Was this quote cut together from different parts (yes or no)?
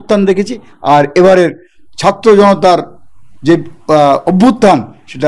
no